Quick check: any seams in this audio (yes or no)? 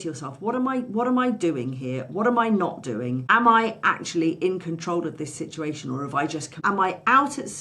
yes